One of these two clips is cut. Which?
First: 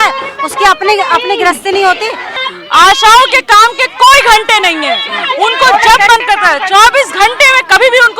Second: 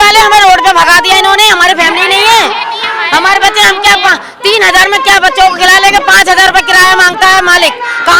first; 1 cut; at 2.3 s

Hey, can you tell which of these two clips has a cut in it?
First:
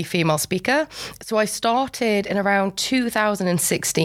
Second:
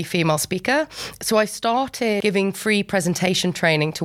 second; 1 cut; at 2.2 s

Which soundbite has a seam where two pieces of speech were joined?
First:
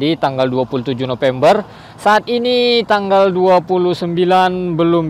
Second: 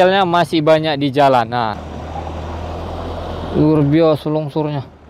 second; 1 cut; at 1.8 s

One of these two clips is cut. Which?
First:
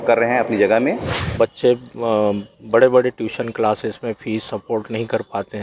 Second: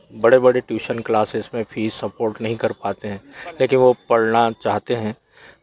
first; 1 cut; at 1.2 s

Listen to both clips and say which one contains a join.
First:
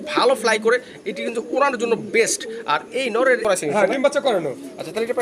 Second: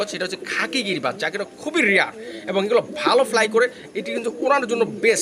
first; 1 cut; at 3.4 s

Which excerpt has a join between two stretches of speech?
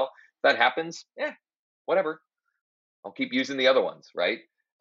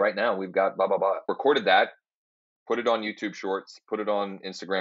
second; 1 cut; at 1.3 s

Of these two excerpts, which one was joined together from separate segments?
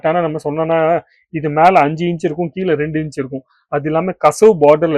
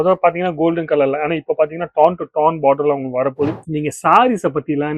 second; 1 cut; at 3.6 s

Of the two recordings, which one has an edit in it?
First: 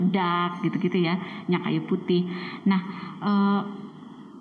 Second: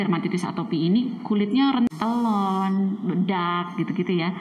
second; 1 cut; at 1.9 s

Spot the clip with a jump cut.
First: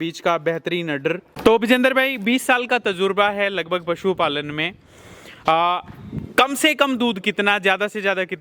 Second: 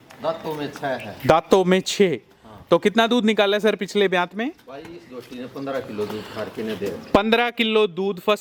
first; 1 cut; at 1.3 s

